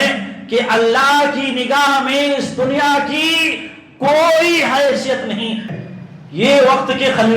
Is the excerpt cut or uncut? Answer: cut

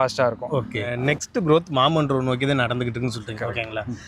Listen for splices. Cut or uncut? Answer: cut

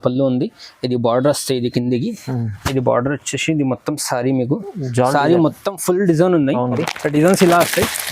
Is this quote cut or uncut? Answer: cut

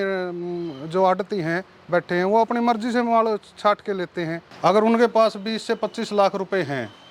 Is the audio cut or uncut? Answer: cut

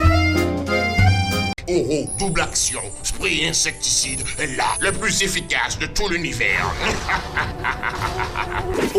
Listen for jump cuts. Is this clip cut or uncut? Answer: uncut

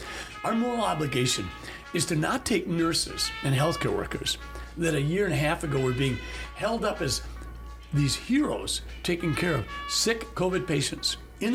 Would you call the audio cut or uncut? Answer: uncut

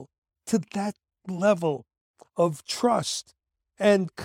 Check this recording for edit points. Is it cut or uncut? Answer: uncut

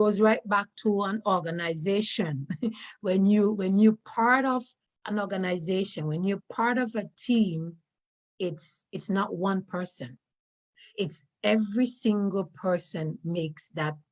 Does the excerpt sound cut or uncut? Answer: uncut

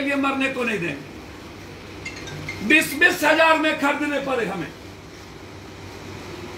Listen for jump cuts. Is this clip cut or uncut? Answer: uncut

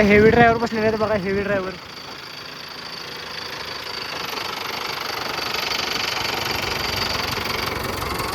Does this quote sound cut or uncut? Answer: uncut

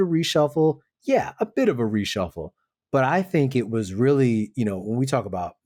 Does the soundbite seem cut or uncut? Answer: uncut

